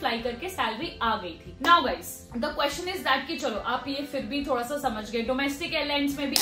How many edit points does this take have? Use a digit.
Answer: 0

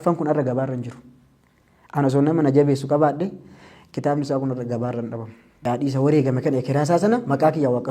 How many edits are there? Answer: 1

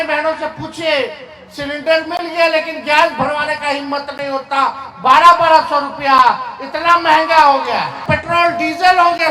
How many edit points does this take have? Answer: 1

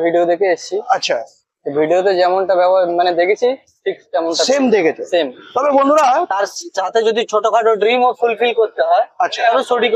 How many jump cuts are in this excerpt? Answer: 1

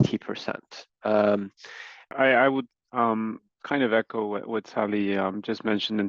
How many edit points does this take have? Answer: 1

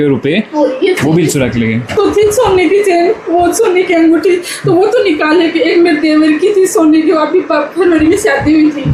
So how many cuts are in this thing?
1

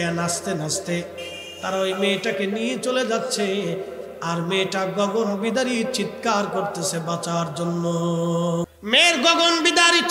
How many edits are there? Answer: 1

